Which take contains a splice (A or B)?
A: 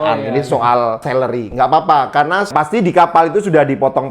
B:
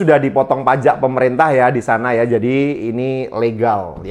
A